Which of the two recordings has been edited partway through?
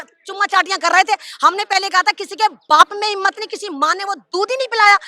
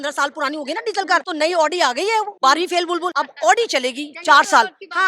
second; 3 cuts; at 1.3 s, 2.3 s, 3.1 s

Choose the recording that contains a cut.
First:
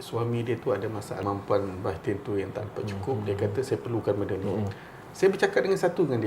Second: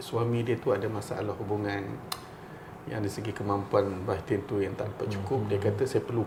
first; 1 cut; at 1.2 s

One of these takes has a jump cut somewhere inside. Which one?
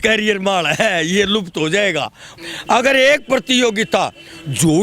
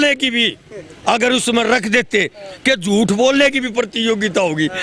first; 1 cut; at 2.2 s

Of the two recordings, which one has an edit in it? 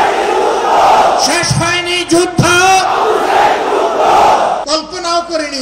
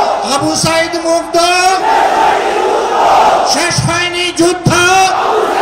first; 1 cut; at 4.6 s

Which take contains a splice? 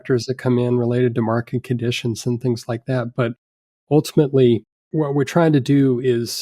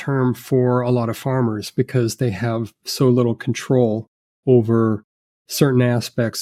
first; 1 cut; at 4.9 s

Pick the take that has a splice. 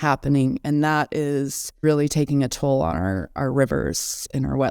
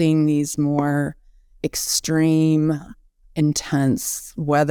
first; 1 cut; at 1.8 s

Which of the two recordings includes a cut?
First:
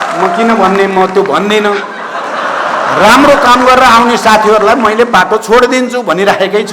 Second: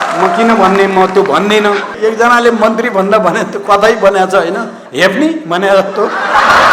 second; 1 cut; at 1.9 s

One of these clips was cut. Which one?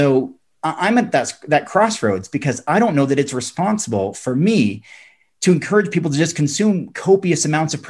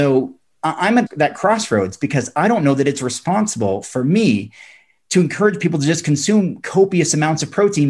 second; 1 cut; at 1.1 s

